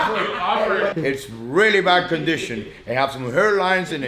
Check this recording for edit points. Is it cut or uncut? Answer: cut